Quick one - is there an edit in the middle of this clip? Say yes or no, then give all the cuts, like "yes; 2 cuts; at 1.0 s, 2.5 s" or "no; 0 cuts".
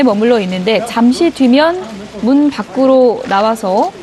yes; 1 cut; at 2.6 s